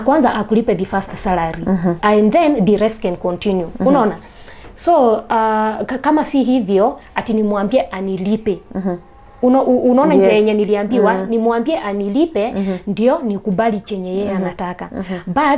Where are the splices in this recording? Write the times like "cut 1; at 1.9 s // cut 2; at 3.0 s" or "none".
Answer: none